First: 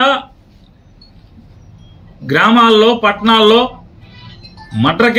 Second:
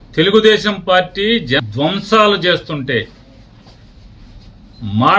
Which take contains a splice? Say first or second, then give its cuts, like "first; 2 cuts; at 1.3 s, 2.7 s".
second; 1 cut; at 1.7 s